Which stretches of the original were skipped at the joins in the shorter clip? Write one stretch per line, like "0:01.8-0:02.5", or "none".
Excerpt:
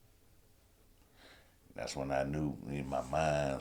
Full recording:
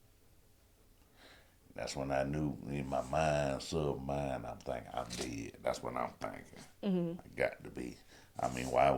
none

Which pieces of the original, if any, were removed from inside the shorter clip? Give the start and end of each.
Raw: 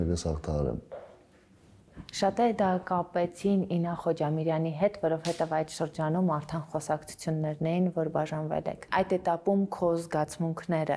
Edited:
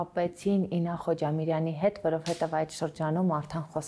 none

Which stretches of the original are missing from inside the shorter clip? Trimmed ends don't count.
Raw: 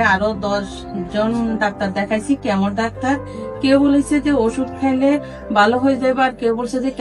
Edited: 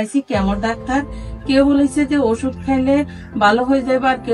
none

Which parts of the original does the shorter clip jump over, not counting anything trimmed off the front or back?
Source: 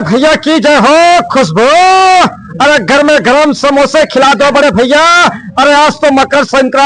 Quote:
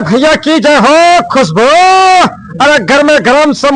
none

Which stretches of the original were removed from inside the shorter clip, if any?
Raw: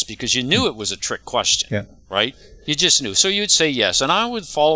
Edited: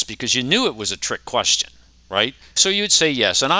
0:02.6-0:03.2

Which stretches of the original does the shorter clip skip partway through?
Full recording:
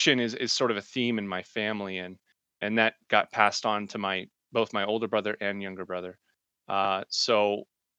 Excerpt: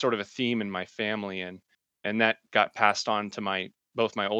none

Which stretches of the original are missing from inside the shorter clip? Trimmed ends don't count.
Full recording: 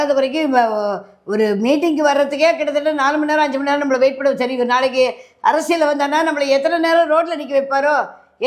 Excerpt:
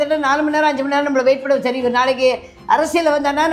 none

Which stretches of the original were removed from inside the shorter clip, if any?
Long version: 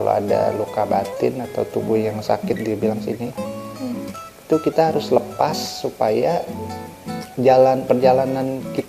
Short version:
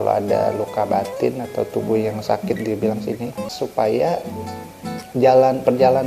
0:03.5-0:05.7

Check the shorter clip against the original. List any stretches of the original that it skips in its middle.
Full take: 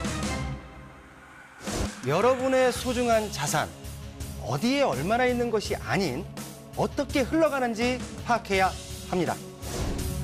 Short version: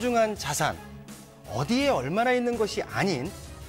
none

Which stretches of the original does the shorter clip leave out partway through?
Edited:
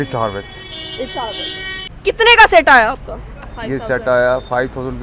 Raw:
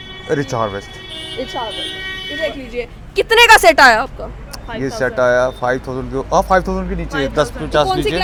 0:02.3-0:03.0

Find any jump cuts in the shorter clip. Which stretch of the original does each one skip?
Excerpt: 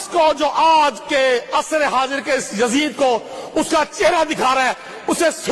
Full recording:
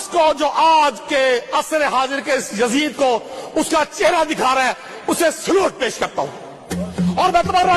none

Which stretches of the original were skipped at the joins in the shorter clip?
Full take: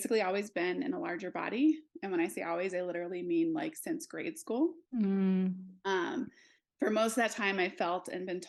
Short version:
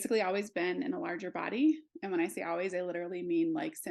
none

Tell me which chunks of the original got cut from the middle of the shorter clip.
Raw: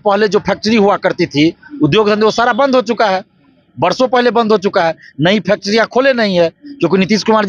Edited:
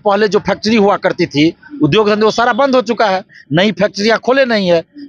0:03.4-0:05.1

